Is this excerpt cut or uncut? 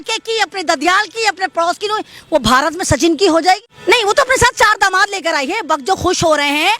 cut